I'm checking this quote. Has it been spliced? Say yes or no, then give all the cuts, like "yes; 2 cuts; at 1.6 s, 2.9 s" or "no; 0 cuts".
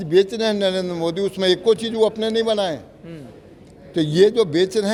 no; 0 cuts